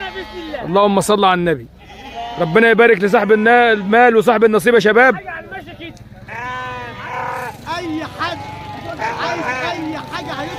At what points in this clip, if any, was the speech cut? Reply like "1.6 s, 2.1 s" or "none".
7.1 s

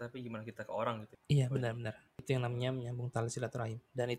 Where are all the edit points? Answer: 1.1 s, 2.2 s

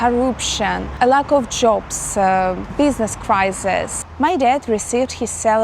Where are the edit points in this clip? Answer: 0.9 s, 2.6 s, 4.0 s

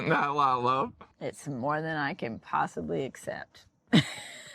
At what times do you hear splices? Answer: 1.1 s

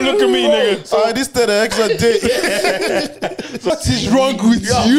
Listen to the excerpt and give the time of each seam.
3.7 s

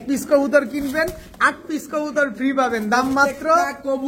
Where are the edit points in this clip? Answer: none

